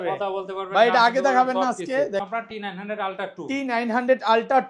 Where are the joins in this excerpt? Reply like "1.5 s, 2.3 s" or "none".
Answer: 2.2 s